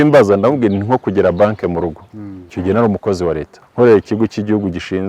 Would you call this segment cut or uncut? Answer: cut